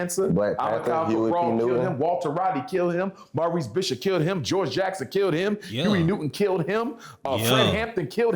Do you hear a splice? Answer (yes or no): no